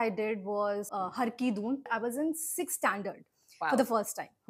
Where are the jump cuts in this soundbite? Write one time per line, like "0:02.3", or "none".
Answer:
0:00.9
0:01.9